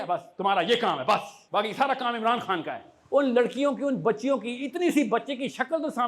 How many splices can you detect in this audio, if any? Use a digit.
2